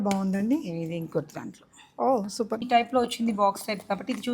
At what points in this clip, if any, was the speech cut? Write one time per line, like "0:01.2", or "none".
0:02.6

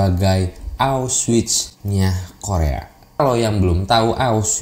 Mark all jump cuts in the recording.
0:03.2

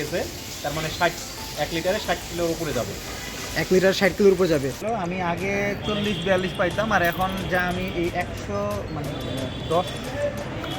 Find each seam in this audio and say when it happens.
0:04.8

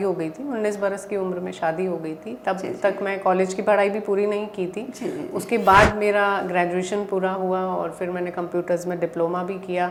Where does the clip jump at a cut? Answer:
none

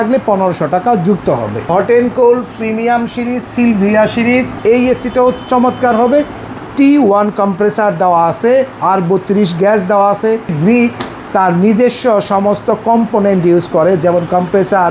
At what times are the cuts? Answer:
0:01.5
0:04.5
0:10.6

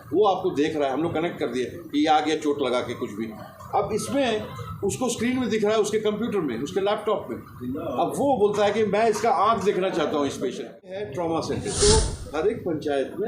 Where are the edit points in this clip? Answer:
0:11.0

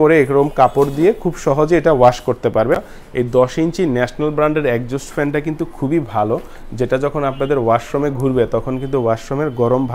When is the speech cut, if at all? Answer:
0:02.8

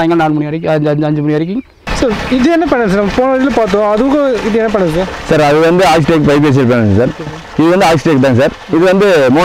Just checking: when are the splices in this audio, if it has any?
0:01.8

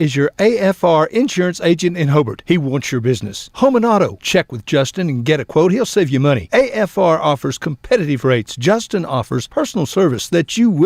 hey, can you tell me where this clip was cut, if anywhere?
none

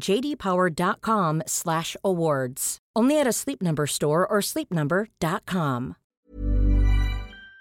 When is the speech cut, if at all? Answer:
0:06.0

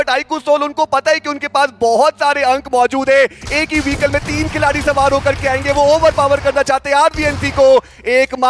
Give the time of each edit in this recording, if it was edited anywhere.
none

